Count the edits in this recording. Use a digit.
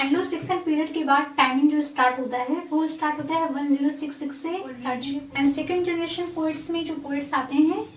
1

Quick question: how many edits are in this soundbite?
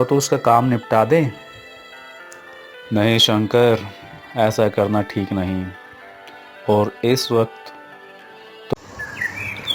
1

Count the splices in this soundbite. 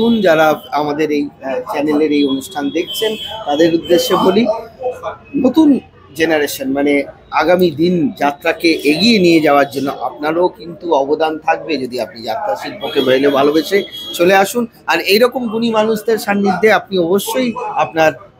0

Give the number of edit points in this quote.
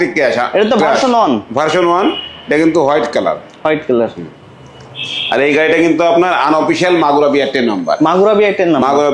0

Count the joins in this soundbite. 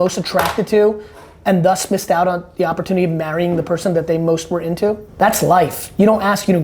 1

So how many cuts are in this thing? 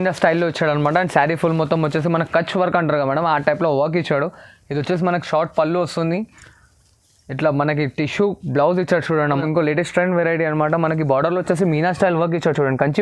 1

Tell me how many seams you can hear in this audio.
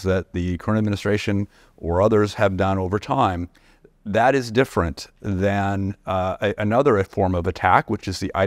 0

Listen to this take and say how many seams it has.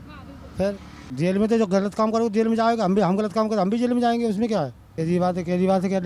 2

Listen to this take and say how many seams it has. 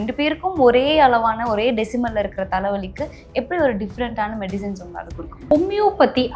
1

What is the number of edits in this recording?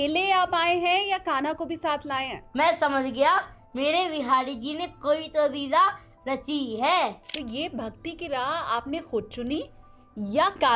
2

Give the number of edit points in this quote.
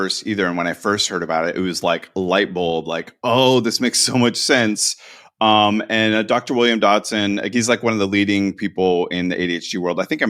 1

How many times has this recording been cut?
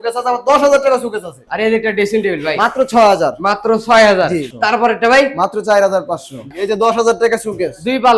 3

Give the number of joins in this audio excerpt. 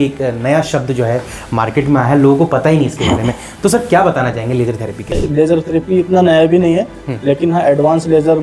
1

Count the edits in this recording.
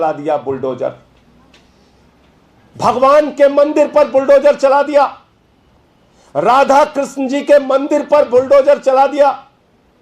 0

